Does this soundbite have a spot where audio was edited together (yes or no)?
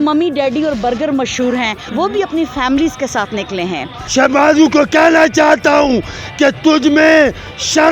yes